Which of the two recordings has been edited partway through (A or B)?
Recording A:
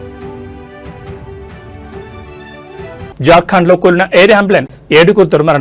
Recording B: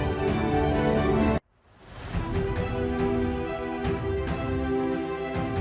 A